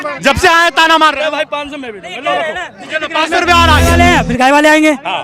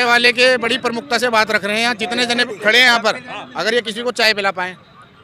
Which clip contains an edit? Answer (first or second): first